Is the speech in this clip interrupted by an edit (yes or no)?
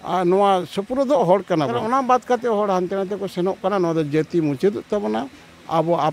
yes